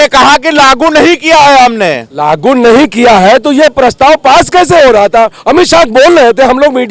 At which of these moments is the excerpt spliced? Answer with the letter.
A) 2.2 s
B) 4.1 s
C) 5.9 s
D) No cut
D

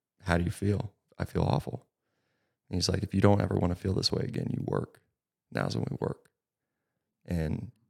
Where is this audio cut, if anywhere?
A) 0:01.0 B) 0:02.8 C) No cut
A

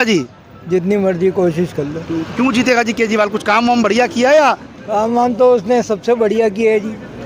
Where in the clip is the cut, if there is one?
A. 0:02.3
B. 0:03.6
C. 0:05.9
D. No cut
D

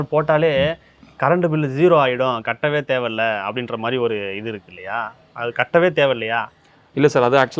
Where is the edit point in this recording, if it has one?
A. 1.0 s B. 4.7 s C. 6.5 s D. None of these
D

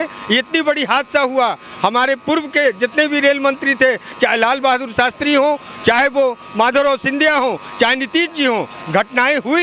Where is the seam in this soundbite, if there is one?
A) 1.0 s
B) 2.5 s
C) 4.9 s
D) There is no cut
D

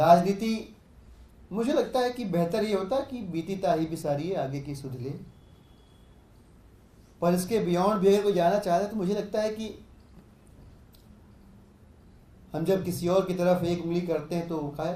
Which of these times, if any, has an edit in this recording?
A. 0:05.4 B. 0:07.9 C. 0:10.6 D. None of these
D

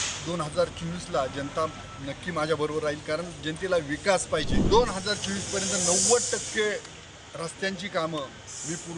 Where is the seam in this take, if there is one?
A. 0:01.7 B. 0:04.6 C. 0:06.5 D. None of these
B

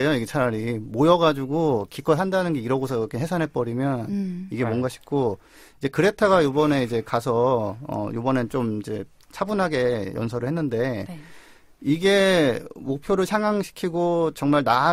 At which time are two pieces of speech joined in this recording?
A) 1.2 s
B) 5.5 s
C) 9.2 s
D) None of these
D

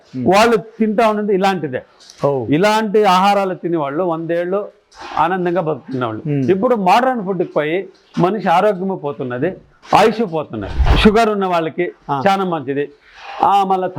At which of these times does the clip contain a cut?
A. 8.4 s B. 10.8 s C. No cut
B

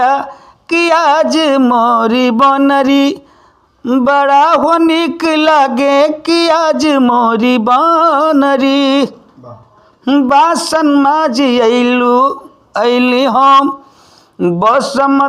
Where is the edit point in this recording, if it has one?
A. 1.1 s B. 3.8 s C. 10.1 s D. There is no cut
D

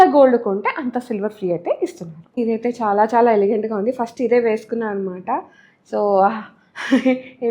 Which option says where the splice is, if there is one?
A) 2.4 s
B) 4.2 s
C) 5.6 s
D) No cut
A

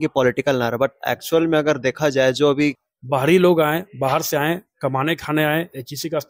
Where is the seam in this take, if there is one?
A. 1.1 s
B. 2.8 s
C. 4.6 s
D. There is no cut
B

